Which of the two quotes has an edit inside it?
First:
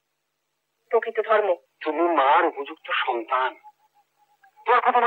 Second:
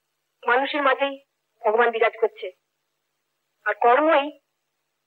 first; 1 cut; at 1.7 s

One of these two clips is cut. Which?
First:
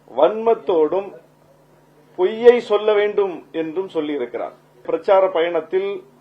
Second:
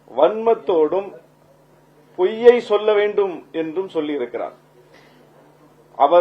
first; 1 cut; at 4.9 s

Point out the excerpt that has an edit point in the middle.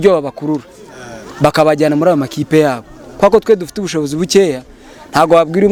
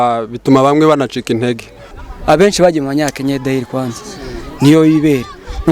second; 1 cut; at 1.9 s

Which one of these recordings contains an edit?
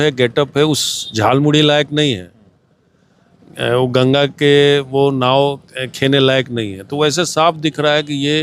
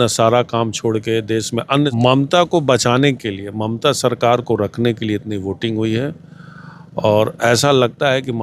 second; 1 cut; at 1.9 s

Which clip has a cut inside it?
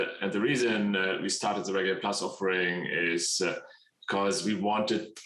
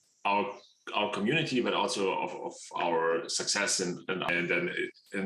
second; 1 cut; at 4.3 s

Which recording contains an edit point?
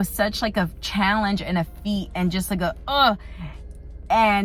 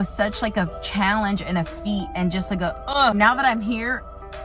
second; 1 cut; at 3.1 s

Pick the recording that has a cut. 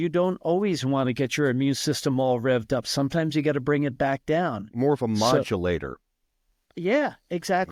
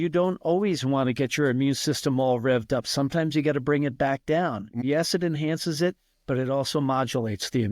second; 1 cut; at 4.8 s

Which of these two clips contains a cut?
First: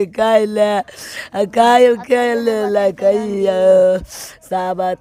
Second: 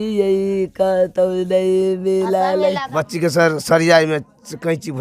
second; 1 cut; at 2.8 s

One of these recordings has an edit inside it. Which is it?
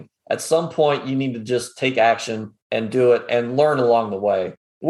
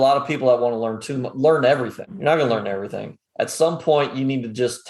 second; 1 cut; at 2.0 s

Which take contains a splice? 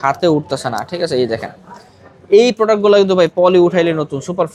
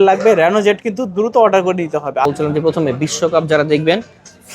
second; 1 cut; at 2.2 s

